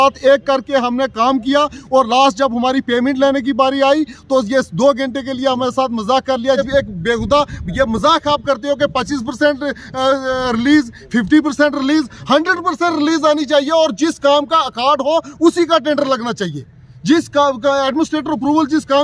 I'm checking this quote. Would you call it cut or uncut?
cut